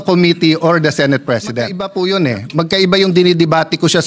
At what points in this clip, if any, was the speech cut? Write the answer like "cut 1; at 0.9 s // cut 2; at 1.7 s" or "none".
cut 1; at 1.8 s